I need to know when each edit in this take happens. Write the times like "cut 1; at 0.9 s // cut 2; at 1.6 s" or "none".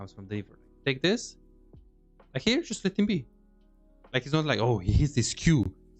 none